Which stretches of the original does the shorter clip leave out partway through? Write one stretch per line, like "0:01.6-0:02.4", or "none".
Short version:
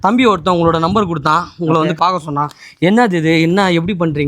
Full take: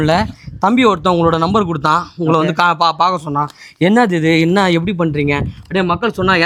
0:02.5-0:02.9